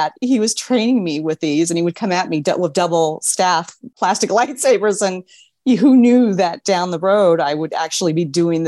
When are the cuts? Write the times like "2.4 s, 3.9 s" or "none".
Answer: none